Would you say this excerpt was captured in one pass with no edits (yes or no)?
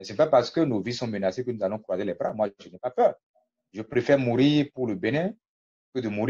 yes